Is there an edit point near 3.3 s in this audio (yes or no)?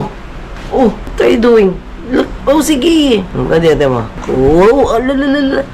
yes